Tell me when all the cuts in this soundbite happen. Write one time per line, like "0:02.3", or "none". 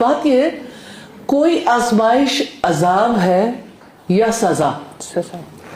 none

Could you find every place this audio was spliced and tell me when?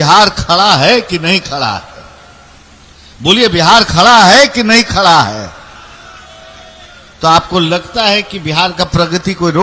none

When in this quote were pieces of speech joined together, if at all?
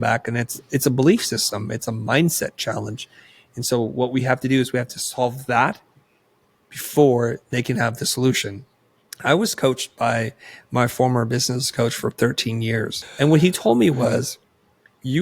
0:09.2
0:13.1

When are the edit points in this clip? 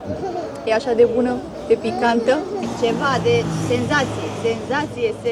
0:02.7

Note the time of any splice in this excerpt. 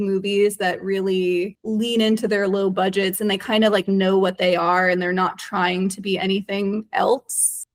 none

